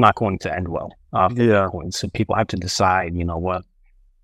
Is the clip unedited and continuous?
yes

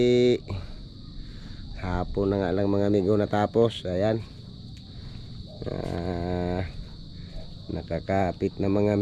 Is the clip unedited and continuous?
yes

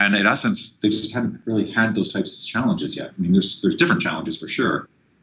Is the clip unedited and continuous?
no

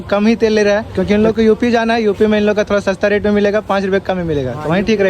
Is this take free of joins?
no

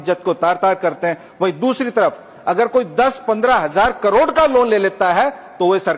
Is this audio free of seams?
yes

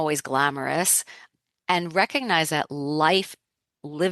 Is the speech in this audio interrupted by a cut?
yes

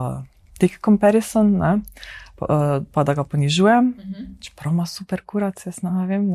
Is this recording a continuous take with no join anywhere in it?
yes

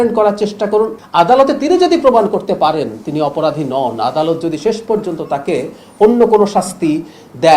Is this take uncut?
no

